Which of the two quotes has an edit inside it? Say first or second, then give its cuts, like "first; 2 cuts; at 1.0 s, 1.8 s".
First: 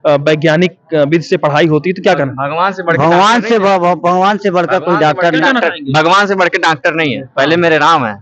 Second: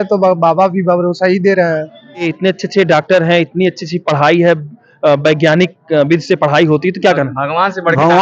second; 1 cut; at 2.3 s